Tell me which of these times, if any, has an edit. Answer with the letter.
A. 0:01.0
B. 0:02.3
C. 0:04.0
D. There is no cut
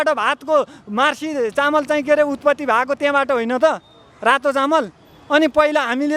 D